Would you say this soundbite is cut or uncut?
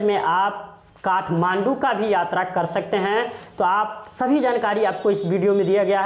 uncut